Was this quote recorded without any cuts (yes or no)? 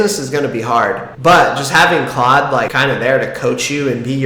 yes